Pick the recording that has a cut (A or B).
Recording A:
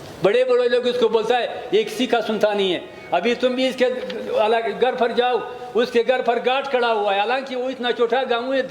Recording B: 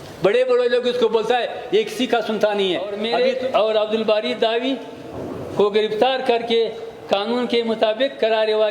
B